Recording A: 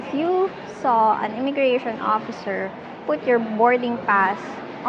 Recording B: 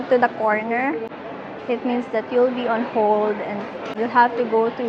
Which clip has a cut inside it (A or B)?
B